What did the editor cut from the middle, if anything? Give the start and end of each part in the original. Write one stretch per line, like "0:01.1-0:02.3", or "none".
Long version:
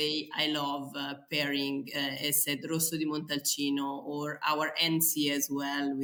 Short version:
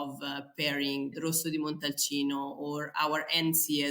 0:01.9-0:02.6